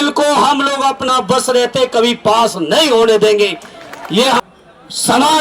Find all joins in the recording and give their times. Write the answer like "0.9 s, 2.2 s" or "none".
4.4 s